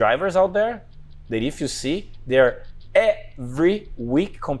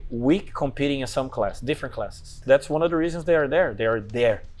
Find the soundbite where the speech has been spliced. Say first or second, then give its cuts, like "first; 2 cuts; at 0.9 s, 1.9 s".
second; 1 cut; at 2.4 s